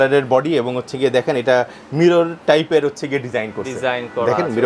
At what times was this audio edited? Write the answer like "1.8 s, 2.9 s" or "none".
none